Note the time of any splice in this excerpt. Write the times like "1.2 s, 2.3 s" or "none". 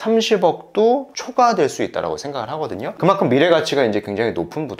none